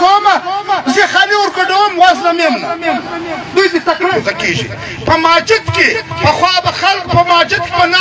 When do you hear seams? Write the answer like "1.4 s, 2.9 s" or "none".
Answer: 4.2 s